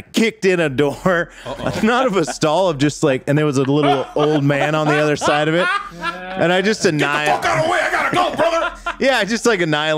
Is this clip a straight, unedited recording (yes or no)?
yes